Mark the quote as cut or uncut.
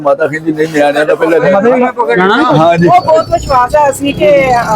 cut